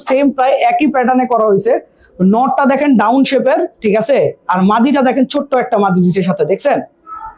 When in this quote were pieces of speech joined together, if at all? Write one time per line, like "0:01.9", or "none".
none